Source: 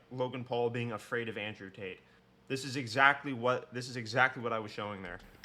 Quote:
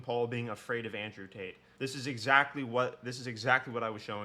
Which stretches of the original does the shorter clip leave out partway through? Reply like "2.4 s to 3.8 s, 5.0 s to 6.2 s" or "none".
2.0 s to 2.3 s